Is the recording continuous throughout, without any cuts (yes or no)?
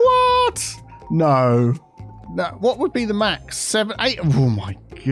yes